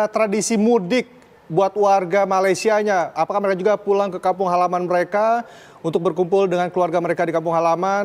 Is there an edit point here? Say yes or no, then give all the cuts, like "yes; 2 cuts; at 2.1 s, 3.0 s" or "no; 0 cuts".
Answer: no; 0 cuts